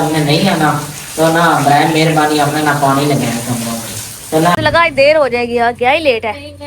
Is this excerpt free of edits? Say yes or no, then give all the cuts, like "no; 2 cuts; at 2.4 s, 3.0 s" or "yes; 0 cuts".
no; 1 cut; at 4.5 s